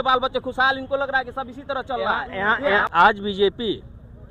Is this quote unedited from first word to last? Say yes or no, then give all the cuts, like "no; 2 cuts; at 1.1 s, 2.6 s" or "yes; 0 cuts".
no; 1 cut; at 2.9 s